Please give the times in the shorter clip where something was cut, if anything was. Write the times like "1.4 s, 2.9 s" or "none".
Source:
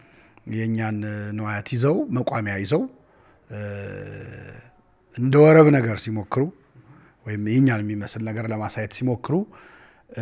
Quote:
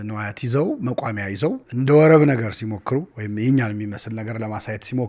1.7 s, 3.2 s